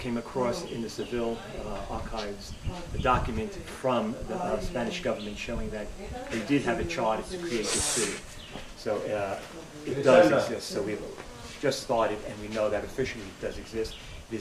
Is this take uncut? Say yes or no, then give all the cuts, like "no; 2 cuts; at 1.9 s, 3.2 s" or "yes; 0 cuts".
no; 1 cut; at 5.9 s